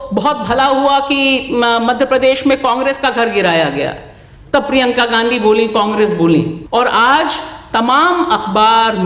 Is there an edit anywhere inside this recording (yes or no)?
yes